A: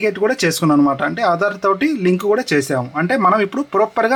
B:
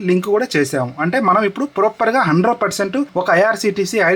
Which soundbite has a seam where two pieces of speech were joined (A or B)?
B